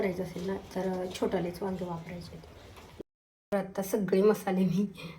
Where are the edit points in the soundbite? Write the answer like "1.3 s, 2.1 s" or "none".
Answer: 3.0 s